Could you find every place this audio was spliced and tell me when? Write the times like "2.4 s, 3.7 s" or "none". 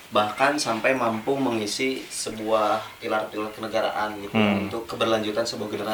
none